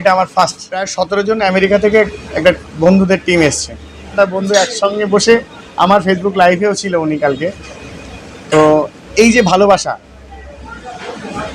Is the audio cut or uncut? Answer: cut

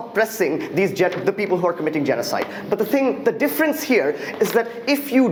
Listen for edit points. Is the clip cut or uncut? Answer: uncut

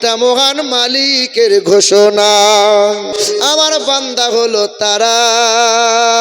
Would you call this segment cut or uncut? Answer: cut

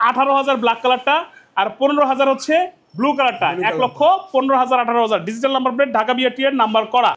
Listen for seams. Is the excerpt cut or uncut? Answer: uncut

